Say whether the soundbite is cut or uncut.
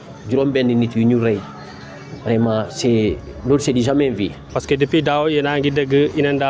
cut